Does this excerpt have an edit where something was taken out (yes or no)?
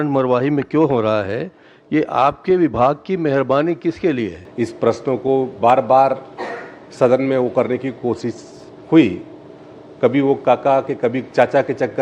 yes